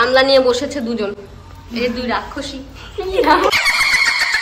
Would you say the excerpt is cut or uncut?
cut